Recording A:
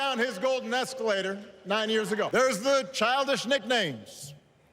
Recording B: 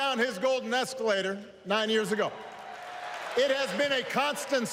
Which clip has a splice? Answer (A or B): A